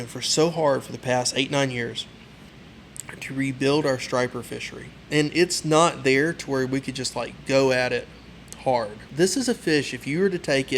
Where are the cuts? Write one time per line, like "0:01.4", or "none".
0:09.0